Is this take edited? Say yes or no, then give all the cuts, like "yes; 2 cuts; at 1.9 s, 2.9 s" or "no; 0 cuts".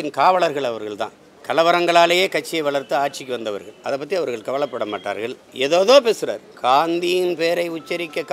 no; 0 cuts